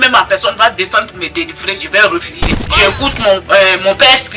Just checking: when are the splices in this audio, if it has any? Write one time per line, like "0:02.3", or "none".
0:02.5